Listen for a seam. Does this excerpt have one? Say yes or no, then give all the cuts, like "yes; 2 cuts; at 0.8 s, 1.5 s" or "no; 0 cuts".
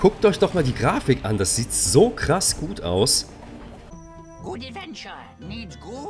yes; 1 cut; at 3.8 s